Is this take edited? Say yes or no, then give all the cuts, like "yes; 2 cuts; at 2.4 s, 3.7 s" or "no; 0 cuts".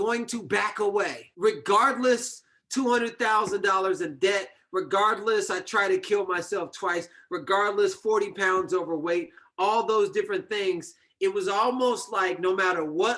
yes; 1 cut; at 1.2 s